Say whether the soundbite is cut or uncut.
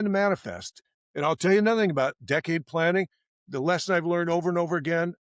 uncut